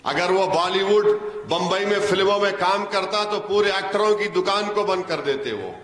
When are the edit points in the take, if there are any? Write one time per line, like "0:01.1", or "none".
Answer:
none